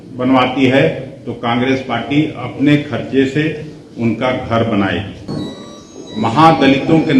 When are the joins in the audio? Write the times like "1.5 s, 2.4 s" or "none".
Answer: 5.3 s